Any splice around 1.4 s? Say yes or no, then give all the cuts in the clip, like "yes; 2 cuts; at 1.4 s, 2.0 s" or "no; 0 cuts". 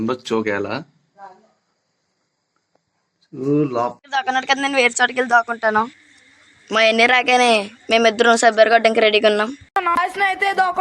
no; 2 cuts; at 4.0 s, 9.7 s